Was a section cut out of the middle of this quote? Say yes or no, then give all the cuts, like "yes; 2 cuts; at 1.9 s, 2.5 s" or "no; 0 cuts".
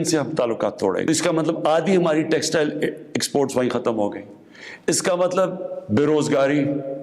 yes; 1 cut; at 1.1 s